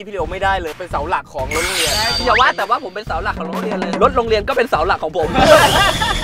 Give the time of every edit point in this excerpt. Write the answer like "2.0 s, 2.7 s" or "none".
0.7 s, 2.2 s